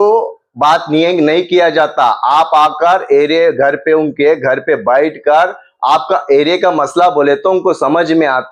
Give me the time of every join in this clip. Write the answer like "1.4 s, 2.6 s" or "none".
none